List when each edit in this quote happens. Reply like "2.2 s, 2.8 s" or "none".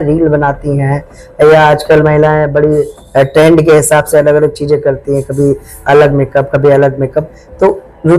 none